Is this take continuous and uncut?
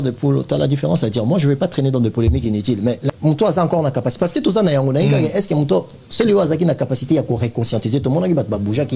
no; 1 cut; at 3.1 s

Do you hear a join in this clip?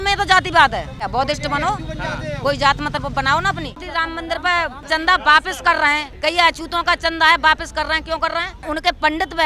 yes; 5 cuts; at 1.0 s, 3.7 s, 4.9 s, 6.1 s, 8.6 s

